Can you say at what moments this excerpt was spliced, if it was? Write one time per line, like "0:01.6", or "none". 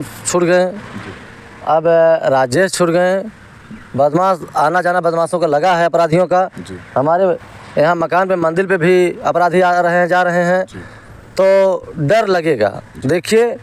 none